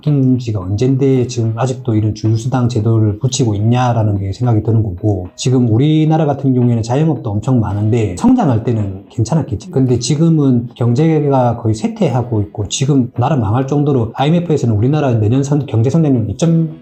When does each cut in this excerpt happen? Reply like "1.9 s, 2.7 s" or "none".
none